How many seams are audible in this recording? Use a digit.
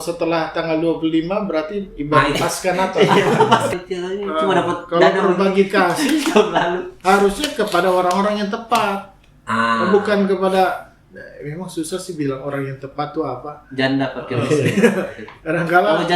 1